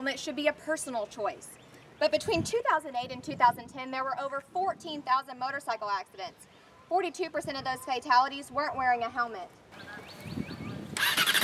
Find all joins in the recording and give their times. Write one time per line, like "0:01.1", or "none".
none